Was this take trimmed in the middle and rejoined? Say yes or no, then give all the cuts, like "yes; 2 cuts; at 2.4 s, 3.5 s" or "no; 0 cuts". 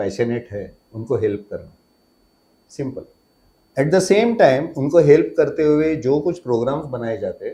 no; 0 cuts